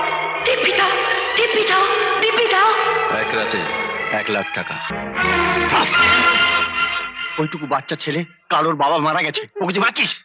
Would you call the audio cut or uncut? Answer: cut